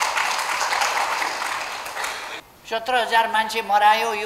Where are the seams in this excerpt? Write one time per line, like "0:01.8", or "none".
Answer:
0:02.5